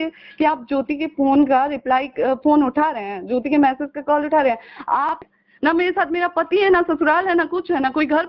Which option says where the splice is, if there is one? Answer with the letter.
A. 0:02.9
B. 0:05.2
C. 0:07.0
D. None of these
B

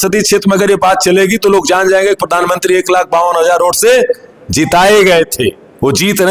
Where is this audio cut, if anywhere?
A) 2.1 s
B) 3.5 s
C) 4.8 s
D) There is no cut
D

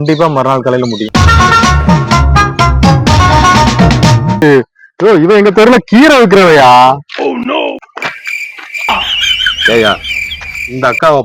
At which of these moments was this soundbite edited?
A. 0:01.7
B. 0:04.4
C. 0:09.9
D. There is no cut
B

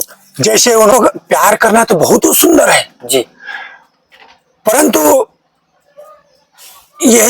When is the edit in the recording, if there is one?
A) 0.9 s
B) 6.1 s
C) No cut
A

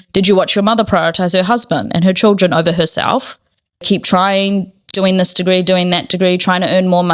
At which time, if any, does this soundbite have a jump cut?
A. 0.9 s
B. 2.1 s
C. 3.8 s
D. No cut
C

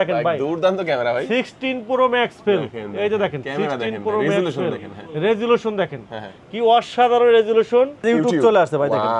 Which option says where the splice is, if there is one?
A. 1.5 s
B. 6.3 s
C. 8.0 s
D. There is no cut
C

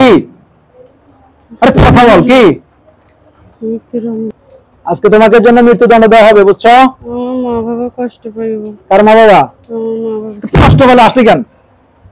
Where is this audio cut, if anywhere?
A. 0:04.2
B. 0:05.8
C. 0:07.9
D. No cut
A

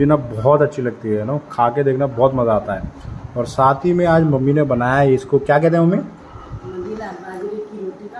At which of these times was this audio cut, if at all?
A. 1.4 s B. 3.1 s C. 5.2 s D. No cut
D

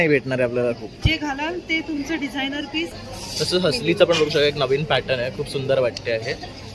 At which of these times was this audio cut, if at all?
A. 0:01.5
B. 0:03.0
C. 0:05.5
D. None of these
B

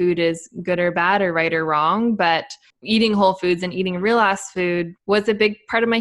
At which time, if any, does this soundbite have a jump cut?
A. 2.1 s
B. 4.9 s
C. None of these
B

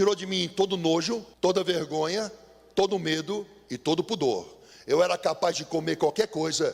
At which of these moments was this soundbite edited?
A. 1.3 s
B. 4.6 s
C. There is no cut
A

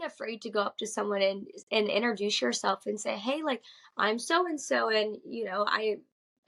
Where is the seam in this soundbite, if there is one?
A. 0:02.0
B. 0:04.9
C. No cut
C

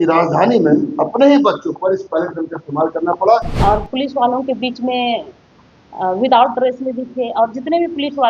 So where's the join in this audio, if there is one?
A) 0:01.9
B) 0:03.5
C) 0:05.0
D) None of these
B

